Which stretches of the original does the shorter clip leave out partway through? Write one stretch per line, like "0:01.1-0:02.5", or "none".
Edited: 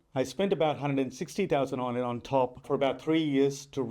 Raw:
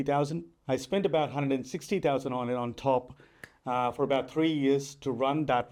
0:03.2-0:03.9